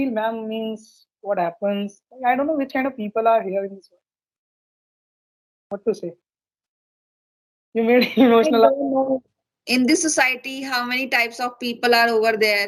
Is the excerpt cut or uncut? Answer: uncut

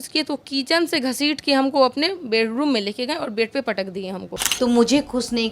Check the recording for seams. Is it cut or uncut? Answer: cut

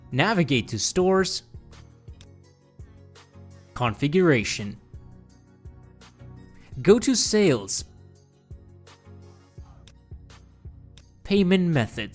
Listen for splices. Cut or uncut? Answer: cut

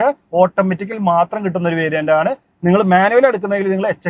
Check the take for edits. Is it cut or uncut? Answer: uncut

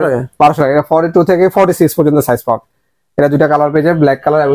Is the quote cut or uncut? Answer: uncut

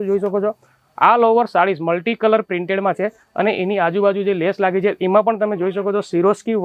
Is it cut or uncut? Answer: uncut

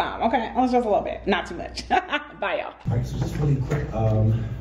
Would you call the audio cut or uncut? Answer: uncut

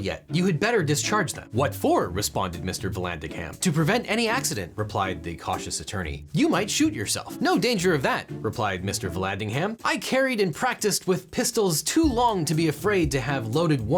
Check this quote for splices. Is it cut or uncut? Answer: uncut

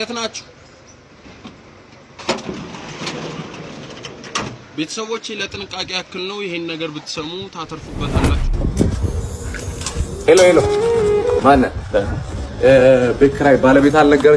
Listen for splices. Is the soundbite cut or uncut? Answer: cut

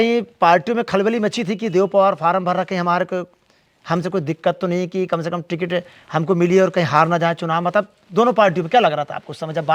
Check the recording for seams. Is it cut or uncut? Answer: uncut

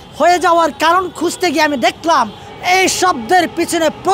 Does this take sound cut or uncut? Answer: cut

